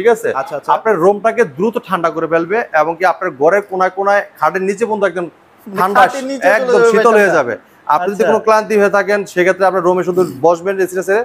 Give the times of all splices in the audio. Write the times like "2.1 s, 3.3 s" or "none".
none